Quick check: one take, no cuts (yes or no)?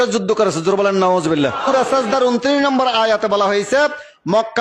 no